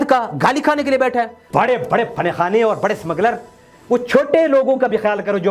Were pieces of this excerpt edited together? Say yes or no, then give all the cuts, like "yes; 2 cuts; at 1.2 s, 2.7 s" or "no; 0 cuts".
yes; 1 cut; at 1.4 s